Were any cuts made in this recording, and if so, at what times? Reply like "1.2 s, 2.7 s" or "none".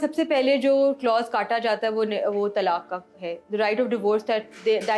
none